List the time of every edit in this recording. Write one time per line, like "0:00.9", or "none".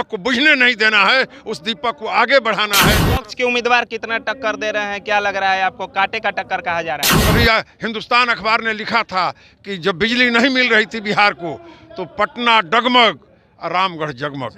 0:03.2
0:07.1